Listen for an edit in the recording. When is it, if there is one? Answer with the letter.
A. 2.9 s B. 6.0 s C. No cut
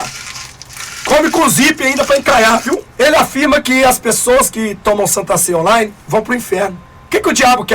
A